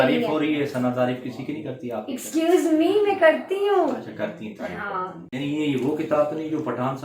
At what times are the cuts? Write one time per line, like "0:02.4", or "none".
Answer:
0:05.2